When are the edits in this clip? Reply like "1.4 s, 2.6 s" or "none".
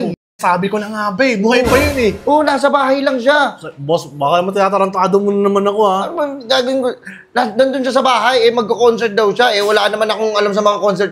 none

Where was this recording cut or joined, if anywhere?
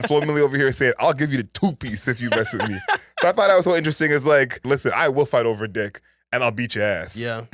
4.7 s

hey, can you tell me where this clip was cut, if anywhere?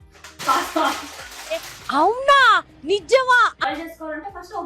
3.6 s

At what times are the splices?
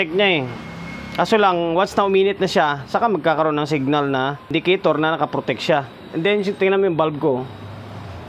4.5 s

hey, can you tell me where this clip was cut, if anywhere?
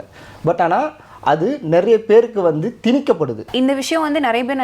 3.5 s

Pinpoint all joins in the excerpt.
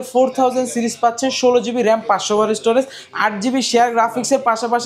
none

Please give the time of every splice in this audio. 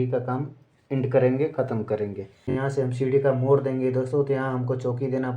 2.5 s

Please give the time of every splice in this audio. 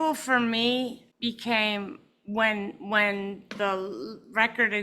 1.1 s

